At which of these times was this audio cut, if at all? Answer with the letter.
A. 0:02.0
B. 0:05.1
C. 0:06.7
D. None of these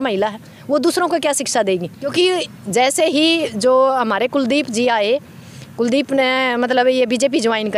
A